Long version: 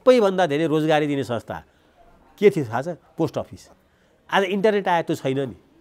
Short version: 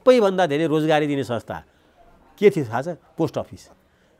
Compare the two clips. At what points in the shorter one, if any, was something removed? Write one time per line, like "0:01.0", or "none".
none